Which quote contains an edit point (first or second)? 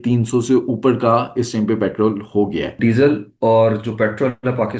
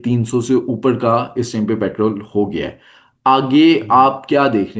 first